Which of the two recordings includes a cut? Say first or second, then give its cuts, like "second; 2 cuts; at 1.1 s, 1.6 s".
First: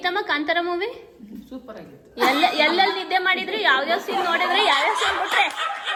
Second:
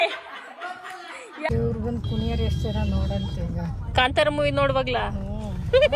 second; 1 cut; at 1.5 s